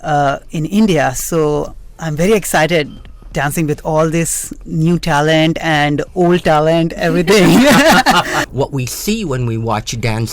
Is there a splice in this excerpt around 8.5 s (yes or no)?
yes